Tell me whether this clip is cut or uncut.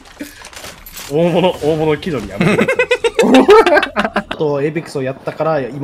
cut